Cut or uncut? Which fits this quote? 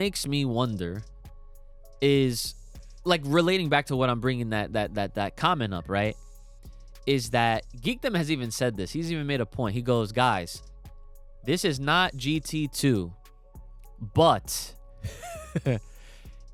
uncut